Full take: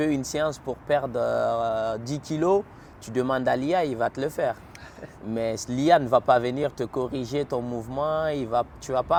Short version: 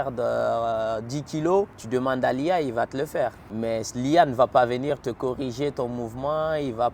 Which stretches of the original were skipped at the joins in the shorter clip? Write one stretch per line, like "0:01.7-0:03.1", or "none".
0:02.7-0:03.0
0:04.7-0:05.2